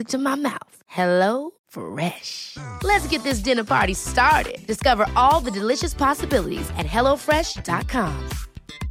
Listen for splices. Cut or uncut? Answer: uncut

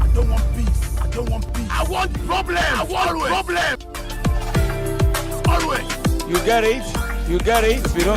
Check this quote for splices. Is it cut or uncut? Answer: uncut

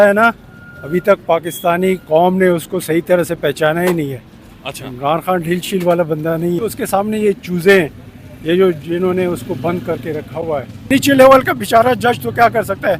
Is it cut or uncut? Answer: cut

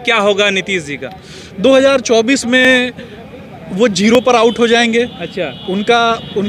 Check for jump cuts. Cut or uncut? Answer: uncut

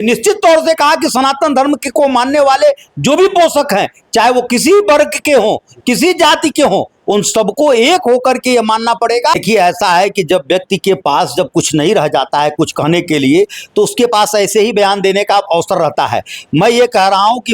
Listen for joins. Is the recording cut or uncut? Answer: cut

